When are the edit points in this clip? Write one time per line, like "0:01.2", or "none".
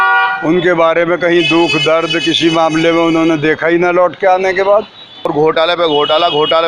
0:05.3